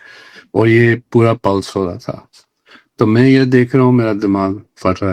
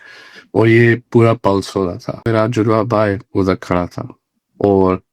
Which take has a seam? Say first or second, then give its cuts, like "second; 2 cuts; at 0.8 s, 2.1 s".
second; 1 cut; at 2.3 s